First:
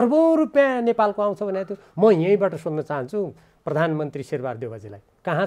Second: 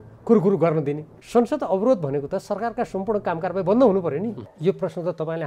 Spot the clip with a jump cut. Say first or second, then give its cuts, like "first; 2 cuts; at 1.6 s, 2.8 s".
second; 2 cuts; at 1.1 s, 4.5 s